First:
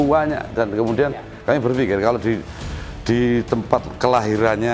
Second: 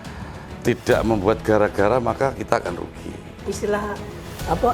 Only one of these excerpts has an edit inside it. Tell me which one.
second; 1 cut; at 3.4 s

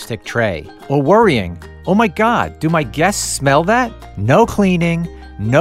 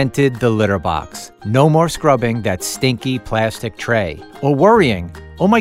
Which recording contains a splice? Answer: first; 1 cut; at 4.1 s

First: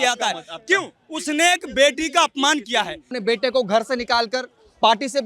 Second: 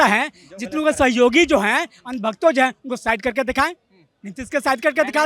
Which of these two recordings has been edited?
first; 1 cut; at 3.1 s

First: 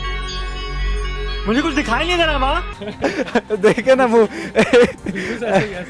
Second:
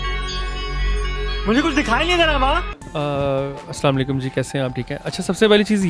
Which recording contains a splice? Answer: second; 1 cut; at 2.8 s

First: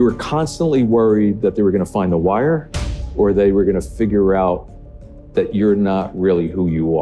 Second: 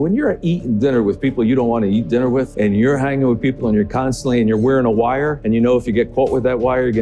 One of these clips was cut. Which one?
second; 2 cuts; at 2.5 s, 5.4 s

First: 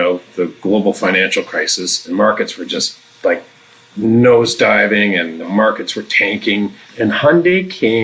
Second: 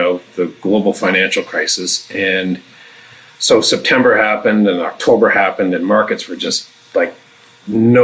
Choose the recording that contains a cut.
first; 3 cuts; at 2.1 s, 5.4 s, 6.8 s

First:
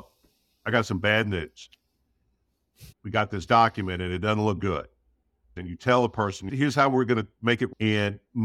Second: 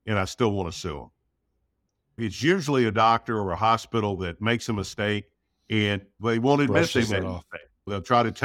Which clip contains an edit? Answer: first; 3 cuts; at 3.0 s, 5.6 s, 6.5 s

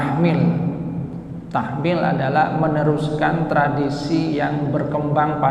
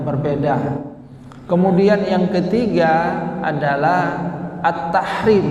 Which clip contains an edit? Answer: second; 1 cut; at 1.0 s

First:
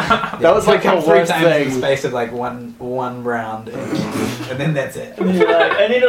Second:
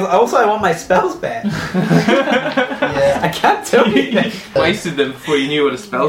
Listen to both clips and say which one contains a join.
second; 1 cut; at 4.5 s

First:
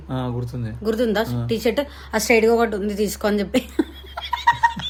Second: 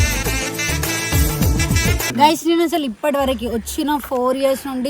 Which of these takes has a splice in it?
second; 1 cut; at 2.1 s

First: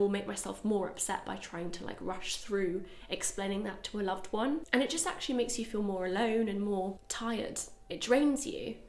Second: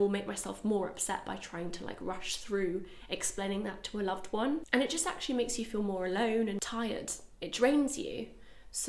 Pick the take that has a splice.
second; 1 cut; at 6.6 s

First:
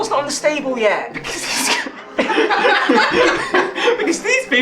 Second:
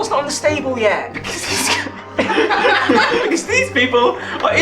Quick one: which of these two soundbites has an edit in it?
second; 1 cut; at 3.2 s

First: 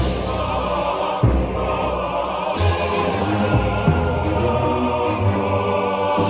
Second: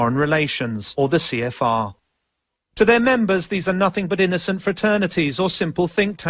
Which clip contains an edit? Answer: second; 1 cut; at 4.0 s

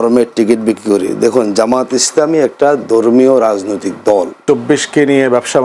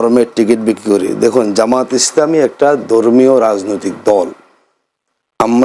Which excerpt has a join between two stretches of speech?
first; 1 cut; at 4.3 s

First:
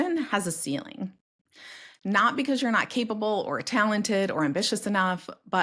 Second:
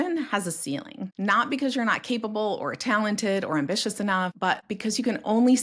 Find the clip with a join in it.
second; 2 cuts; at 1.0 s, 4.6 s

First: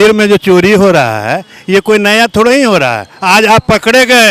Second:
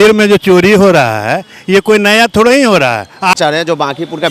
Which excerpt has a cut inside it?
second; 1 cut; at 3.3 s

